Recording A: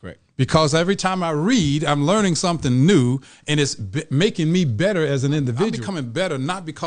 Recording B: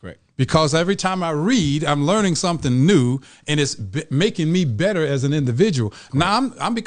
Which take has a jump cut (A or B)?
A